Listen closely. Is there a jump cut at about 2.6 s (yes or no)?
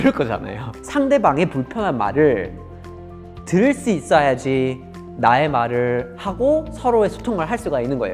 no